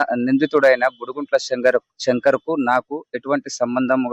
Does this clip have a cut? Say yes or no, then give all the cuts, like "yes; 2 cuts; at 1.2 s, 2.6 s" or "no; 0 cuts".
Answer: no; 0 cuts